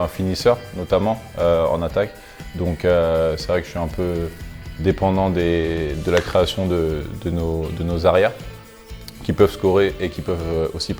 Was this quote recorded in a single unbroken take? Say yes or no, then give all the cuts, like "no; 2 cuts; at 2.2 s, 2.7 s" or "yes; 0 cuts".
yes; 0 cuts